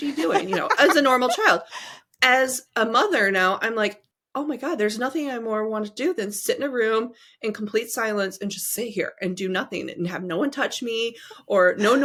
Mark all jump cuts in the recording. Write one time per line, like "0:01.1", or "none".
none